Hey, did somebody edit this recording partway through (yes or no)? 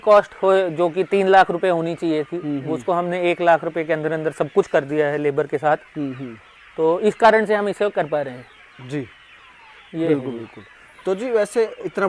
no